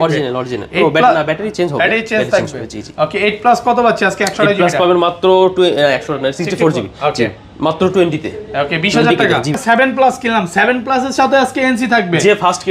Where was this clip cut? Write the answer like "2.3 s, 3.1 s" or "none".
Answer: 9.6 s